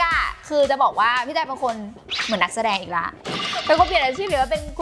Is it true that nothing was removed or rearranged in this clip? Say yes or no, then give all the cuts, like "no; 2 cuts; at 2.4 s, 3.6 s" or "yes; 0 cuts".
yes; 0 cuts